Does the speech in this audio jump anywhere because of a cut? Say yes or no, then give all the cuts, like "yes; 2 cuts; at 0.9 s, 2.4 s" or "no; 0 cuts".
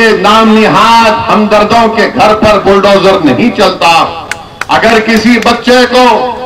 no; 0 cuts